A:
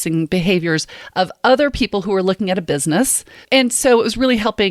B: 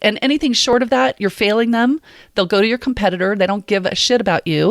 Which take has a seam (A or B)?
A